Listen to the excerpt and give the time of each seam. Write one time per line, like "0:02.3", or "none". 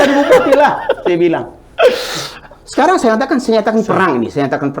none